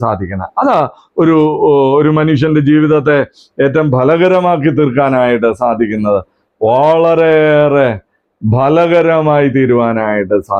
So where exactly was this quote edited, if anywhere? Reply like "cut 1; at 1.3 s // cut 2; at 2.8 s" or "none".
none